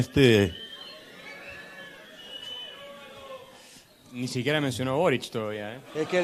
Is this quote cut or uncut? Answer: uncut